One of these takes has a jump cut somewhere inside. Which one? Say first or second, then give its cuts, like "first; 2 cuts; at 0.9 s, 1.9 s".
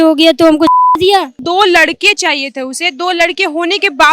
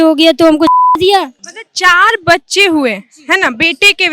first; 1 cut; at 1.4 s